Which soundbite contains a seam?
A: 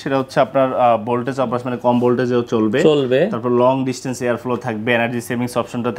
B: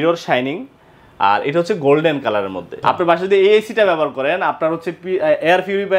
B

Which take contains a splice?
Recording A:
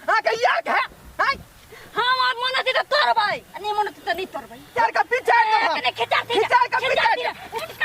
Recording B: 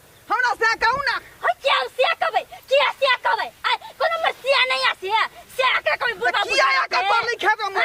A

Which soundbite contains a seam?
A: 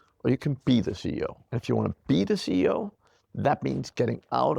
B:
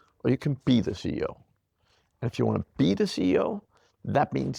A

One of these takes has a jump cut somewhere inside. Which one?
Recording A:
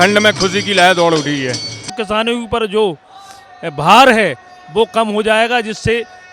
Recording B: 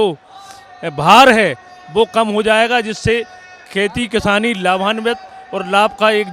A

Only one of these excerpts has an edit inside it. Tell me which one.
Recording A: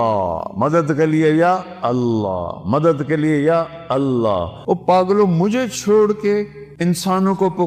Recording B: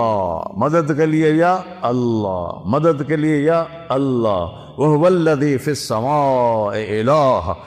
A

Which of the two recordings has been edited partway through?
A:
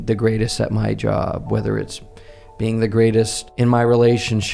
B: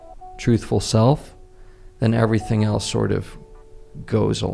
A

